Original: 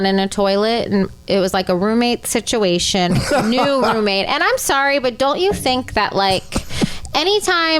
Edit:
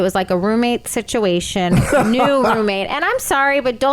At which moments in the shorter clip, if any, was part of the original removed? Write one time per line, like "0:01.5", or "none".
none